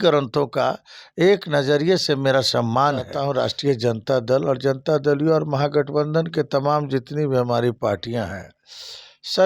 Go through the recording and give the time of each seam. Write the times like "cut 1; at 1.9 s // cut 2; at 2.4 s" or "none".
cut 1; at 3.1 s